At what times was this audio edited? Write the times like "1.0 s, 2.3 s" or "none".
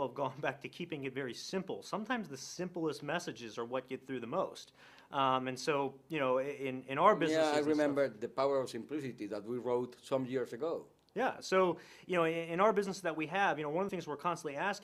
none